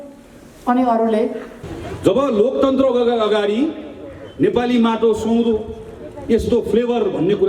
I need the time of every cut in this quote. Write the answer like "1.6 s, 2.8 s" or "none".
1.5 s